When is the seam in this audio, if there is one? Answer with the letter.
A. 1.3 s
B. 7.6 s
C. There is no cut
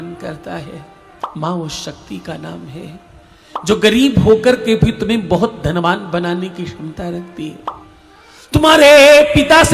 A